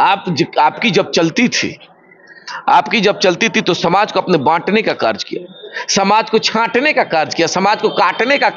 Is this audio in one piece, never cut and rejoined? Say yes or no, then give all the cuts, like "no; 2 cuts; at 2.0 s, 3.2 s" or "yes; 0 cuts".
yes; 0 cuts